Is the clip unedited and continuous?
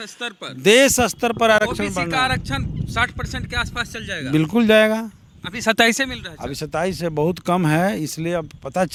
yes; 0 cuts

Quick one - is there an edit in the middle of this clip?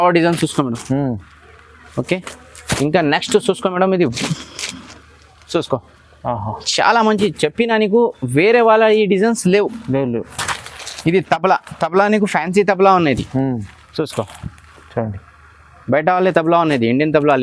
no; 0 cuts

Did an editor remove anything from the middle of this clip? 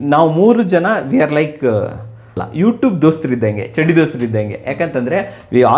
yes; 1 cut; at 2.4 s

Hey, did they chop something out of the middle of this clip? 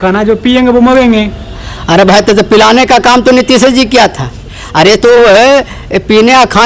no; 0 cuts

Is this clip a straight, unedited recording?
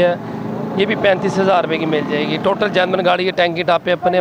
yes; 0 cuts

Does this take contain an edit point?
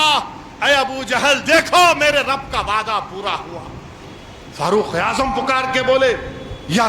no; 0 cuts

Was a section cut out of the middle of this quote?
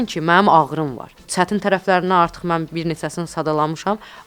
yes; 1 cut; at 1.2 s

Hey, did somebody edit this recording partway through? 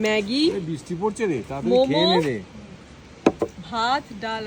no; 0 cuts

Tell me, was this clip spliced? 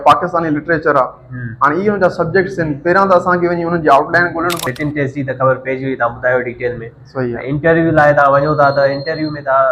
yes; 1 cut; at 4.7 s

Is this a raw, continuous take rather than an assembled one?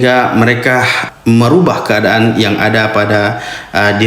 no; 1 cut; at 1.0 s

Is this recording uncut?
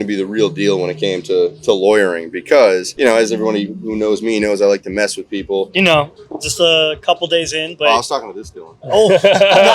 no; 1 cut; at 5.7 s

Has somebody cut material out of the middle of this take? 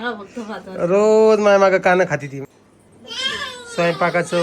yes; 1 cut; at 2.4 s

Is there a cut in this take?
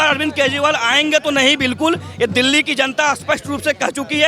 no; 0 cuts

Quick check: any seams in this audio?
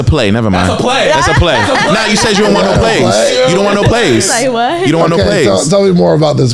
no; 0 cuts

